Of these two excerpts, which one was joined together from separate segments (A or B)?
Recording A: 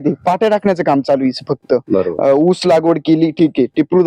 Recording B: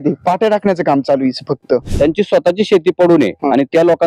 B